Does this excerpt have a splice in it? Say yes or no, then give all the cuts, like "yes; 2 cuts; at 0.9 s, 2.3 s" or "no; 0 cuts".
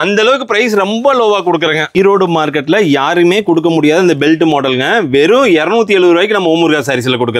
yes; 1 cut; at 2.0 s